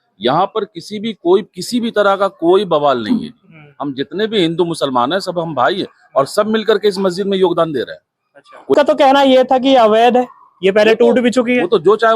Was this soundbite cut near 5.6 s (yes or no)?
no